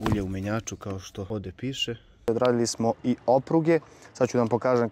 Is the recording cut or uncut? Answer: cut